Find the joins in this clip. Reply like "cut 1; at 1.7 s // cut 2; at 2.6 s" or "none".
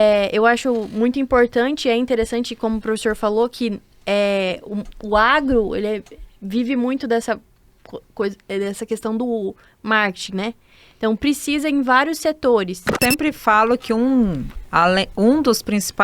cut 1; at 13.0 s